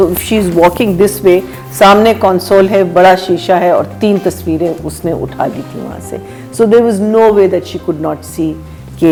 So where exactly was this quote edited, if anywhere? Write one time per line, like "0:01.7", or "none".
none